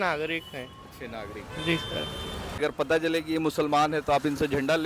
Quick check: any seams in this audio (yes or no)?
yes